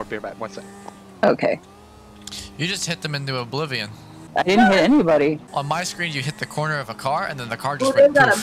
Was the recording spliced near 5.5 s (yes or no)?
yes